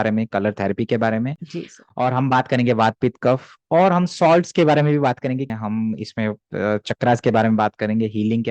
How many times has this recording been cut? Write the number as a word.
one